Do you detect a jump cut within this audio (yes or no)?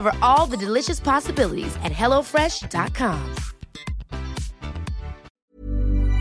yes